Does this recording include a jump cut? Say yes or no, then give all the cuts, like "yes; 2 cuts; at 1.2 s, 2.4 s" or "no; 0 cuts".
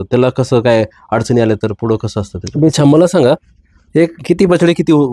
yes; 1 cut; at 2.7 s